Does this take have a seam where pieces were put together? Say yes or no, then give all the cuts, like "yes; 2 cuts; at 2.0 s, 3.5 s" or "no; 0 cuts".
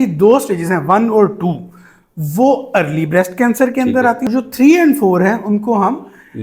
yes; 1 cut; at 4.3 s